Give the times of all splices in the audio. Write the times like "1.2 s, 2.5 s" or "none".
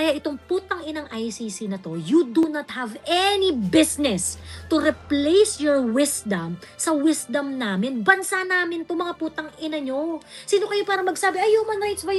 none